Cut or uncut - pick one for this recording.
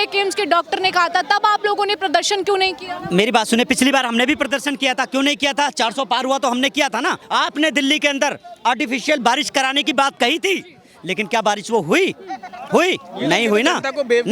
uncut